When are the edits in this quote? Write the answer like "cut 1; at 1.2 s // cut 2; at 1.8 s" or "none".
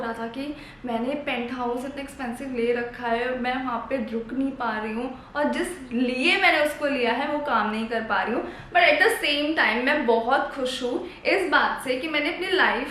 none